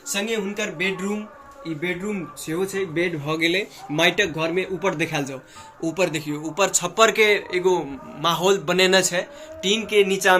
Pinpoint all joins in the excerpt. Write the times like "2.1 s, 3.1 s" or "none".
none